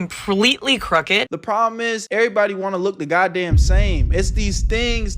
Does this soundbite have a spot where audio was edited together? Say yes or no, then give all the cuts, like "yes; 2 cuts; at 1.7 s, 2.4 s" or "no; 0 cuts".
yes; 1 cut; at 1.3 s